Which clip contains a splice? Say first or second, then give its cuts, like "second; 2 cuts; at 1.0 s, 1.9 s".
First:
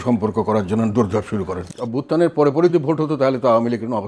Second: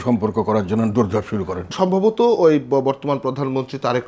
first; 2 cuts; at 1.6 s, 2.7 s